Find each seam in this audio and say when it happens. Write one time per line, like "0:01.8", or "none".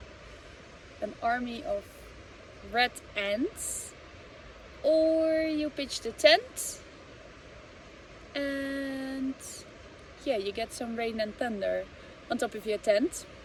none